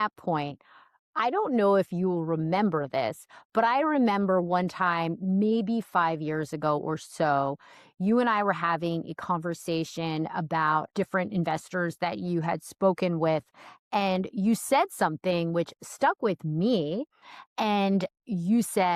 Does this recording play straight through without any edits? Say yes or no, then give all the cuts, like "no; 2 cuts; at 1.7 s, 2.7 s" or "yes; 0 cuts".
yes; 0 cuts